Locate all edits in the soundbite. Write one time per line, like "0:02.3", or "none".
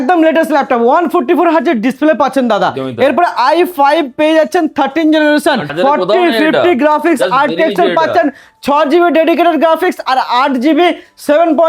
0:05.7

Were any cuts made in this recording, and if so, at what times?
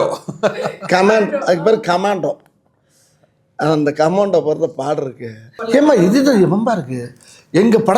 0:05.5

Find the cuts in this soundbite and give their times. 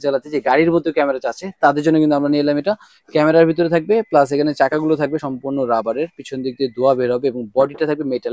none

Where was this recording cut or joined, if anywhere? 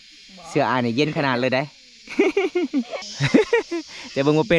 0:03.0

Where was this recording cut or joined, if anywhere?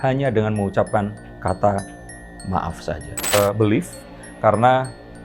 0:03.3

